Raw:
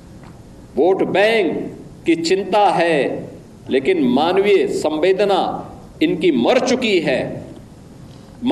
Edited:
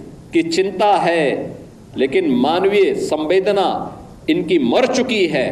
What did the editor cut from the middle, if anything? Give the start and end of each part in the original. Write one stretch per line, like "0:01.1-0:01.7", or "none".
none